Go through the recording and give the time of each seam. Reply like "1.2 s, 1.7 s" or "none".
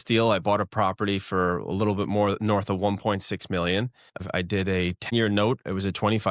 4.2 s, 5.1 s